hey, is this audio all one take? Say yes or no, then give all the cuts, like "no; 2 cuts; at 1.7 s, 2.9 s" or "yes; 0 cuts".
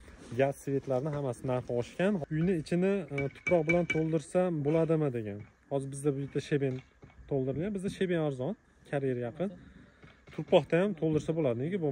no; 1 cut; at 2.2 s